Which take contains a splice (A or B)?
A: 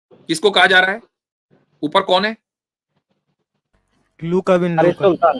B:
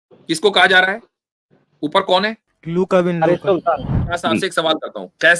B